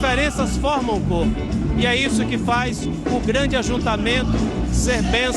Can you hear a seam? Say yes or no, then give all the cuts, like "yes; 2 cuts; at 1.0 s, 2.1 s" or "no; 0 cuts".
no; 0 cuts